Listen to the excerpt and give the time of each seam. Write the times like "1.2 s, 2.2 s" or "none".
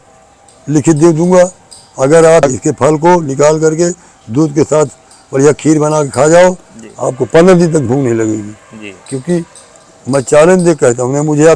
2.6 s

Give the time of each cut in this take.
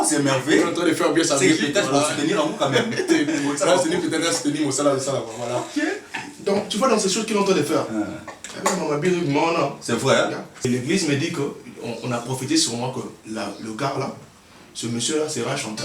10.7 s

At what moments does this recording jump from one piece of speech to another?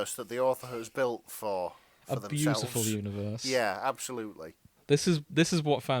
none

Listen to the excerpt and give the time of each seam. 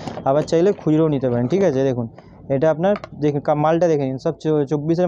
none

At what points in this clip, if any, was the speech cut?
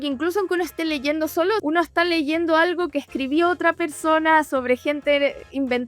1.6 s

